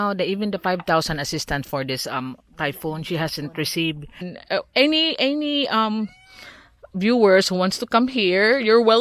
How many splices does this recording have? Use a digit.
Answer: 1